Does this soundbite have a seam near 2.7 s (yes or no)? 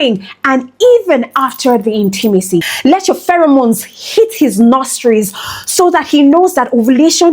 yes